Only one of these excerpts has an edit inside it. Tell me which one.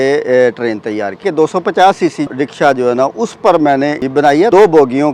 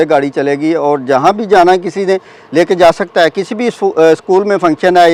first; 3 cuts; at 1.2 s, 2.3 s, 4.4 s

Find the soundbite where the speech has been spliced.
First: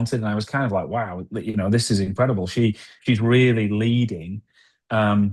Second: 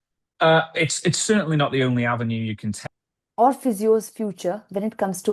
second; 1 cut; at 2.8 s

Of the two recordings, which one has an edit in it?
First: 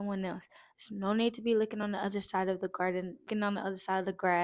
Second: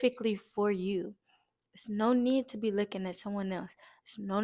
first; 1 cut; at 3.3 s

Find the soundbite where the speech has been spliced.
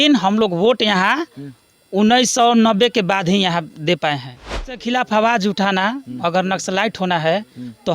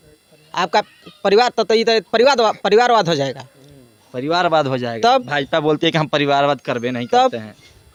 first; 1 cut; at 4.8 s

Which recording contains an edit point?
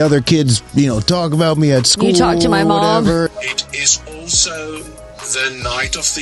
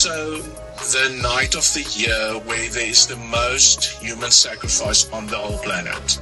first; 1 cut; at 3.3 s

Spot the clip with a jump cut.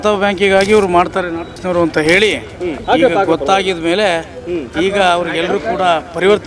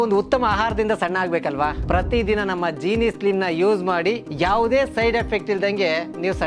first; 2 cuts; at 1.5 s, 2.7 s

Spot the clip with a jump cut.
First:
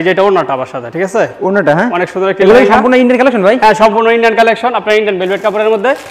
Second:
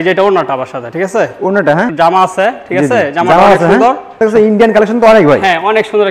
second; 2 cuts; at 1.9 s, 4.1 s

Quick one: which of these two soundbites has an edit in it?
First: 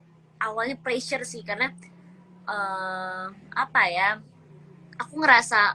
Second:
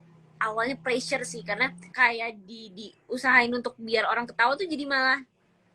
second; 1 cut; at 1.8 s

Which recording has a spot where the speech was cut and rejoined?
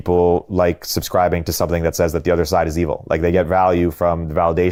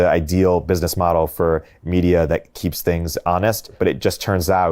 second; 2 cuts; at 2.6 s, 3.8 s

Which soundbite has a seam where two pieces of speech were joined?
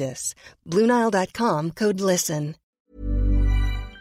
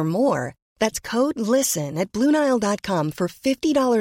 first; 1 cut; at 2.6 s

